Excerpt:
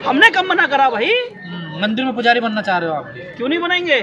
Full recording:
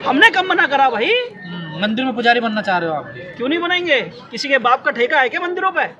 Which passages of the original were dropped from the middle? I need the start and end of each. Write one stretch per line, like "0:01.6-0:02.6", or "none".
none